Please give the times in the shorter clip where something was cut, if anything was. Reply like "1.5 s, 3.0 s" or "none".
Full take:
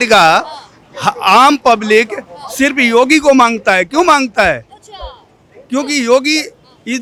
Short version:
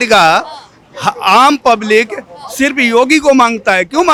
none